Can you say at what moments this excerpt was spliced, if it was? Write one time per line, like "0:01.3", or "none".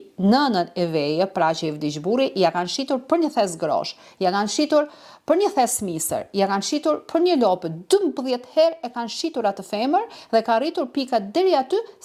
none